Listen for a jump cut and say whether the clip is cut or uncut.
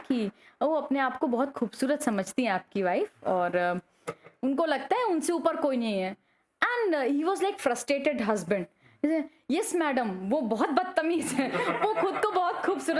uncut